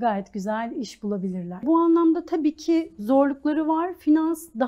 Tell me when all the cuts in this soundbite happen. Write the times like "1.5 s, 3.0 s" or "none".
1.6 s